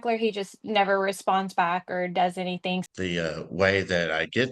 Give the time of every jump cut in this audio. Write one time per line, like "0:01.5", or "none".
0:02.8